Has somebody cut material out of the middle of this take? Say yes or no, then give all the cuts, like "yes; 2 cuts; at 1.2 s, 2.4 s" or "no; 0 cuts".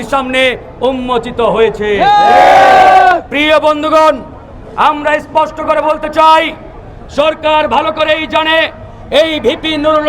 no; 0 cuts